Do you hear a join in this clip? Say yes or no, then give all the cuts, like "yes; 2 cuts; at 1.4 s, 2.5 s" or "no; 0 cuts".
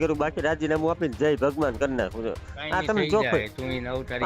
no; 0 cuts